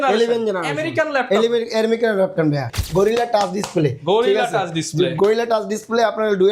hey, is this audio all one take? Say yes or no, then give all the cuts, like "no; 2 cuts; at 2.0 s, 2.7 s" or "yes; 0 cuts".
no; 1 cut; at 2.7 s